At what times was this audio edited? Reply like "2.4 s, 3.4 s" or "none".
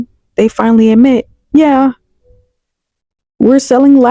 none